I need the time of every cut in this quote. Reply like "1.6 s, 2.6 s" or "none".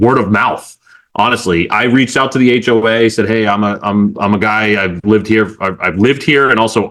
none

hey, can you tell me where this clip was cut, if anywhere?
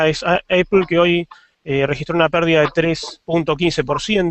3.4 s

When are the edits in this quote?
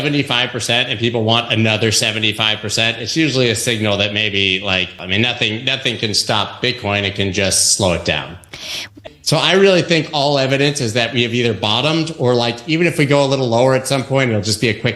4.9 s, 9.0 s

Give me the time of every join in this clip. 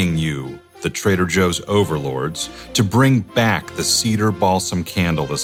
none

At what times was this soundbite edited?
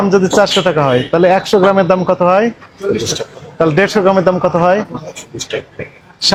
none

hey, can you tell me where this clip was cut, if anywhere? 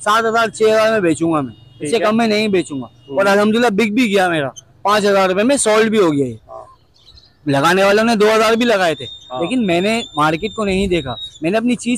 none

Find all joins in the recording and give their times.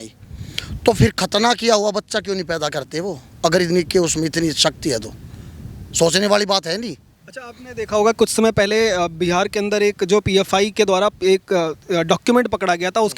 none

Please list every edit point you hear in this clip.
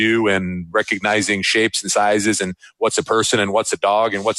none

